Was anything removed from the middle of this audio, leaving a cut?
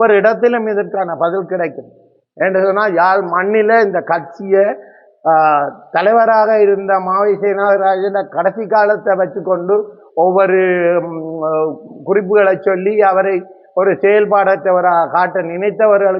no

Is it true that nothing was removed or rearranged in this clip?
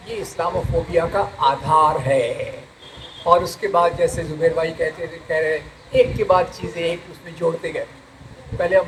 yes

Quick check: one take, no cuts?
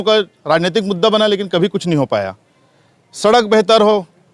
yes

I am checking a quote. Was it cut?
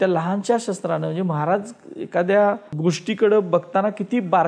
yes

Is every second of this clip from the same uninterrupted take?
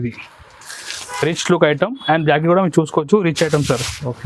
yes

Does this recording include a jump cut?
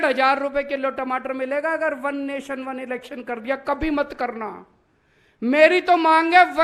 no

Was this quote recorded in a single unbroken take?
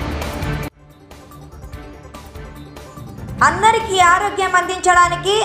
no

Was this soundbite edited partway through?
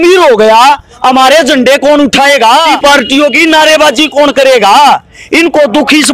yes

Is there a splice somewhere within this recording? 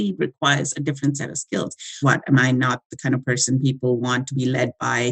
yes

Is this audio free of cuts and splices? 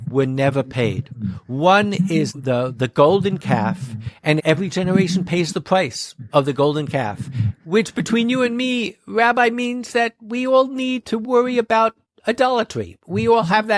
no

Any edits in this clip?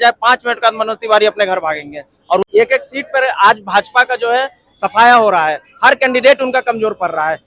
yes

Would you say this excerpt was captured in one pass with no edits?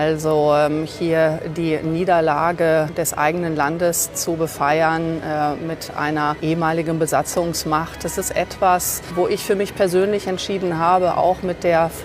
no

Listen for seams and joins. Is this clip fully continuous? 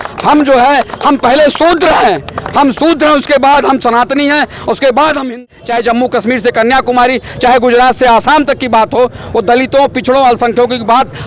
no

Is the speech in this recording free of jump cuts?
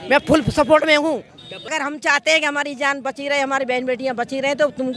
no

